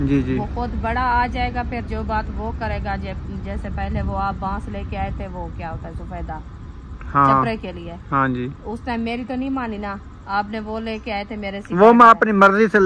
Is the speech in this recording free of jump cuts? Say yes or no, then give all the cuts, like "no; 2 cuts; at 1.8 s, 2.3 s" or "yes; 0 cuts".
yes; 0 cuts